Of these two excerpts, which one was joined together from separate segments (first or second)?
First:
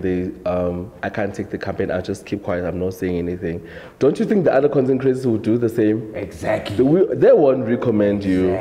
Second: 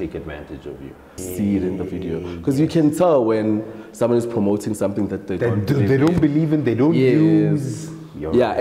second